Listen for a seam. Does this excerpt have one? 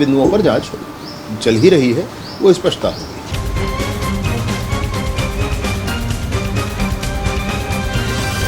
no; 0 cuts

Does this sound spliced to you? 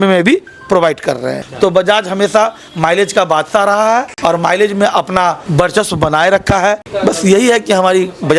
yes; 4 cuts; at 1.4 s, 4.1 s, 5.4 s, 6.9 s

